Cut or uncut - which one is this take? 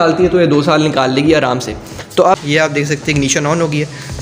cut